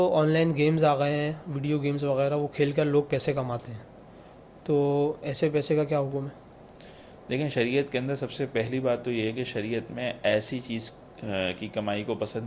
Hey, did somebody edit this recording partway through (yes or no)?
no